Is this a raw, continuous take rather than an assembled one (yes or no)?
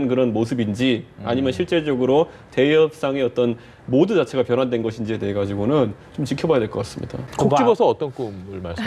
no